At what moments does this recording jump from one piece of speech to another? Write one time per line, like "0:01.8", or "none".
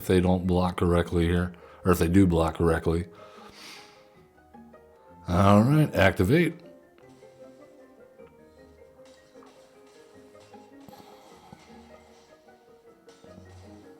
0:05.0